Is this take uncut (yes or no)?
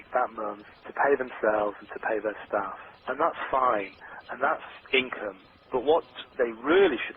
no